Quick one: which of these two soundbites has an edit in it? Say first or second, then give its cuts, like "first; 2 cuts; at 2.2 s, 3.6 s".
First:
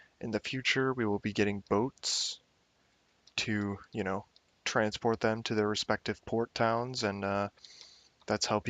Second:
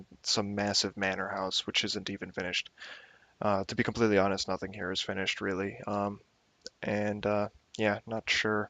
second; 1 cut; at 4.4 s